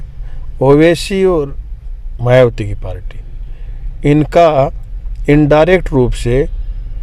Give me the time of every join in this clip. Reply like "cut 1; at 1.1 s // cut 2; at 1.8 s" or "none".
none